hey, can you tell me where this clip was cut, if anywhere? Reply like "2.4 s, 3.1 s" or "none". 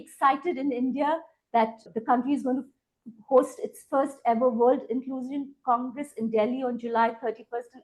1.8 s

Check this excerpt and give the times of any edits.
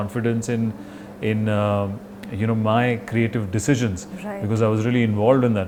none

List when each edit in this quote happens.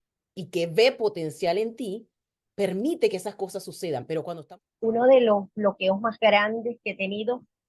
4.4 s

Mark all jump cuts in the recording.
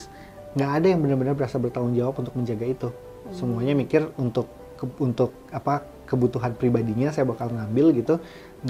none

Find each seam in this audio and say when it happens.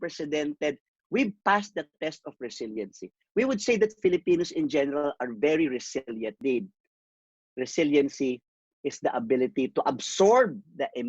0.9 s, 6.4 s

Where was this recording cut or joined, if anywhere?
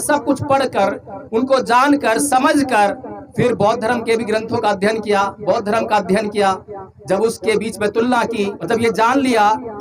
8.6 s

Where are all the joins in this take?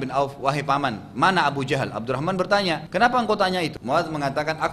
2.8 s, 3.8 s

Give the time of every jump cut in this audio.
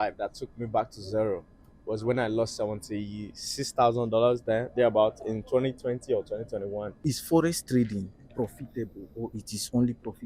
6.9 s

